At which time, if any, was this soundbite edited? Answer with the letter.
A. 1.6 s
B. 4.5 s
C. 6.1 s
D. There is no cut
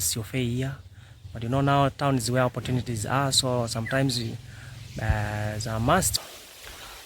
C